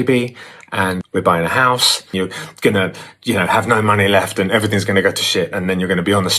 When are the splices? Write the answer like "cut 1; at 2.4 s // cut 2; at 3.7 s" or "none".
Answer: cut 1; at 1.0 s // cut 2; at 2.1 s